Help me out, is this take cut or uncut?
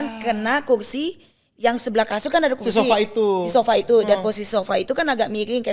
uncut